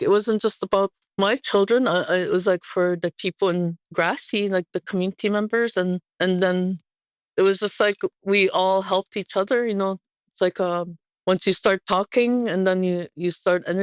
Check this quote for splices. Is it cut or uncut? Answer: cut